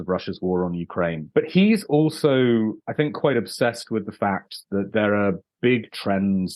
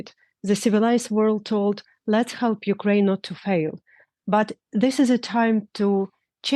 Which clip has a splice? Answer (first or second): first